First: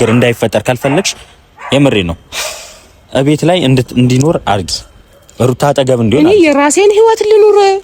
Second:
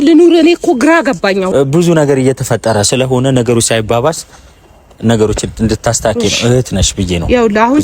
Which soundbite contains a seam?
second; 1 cut; at 1.5 s

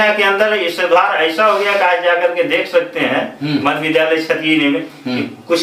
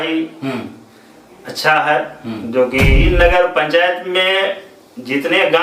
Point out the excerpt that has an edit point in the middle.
second; 1 cut; at 3.0 s

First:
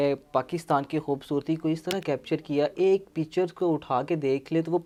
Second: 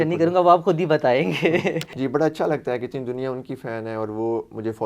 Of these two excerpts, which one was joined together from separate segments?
second; 1 cut; at 1.9 s

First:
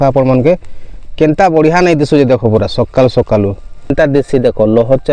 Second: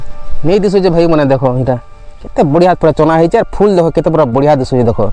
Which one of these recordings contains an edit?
first; 1 cut; at 3.9 s

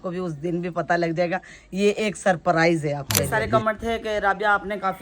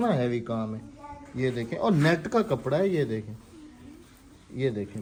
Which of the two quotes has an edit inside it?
first; 1 cut; at 3.3 s

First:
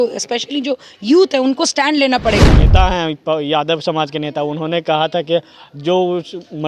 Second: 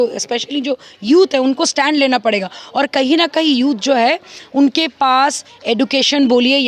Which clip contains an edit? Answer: first; 1 cut; at 2.6 s

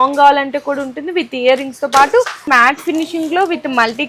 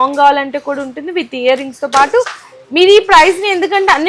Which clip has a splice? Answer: first; 1 cut; at 2.4 s

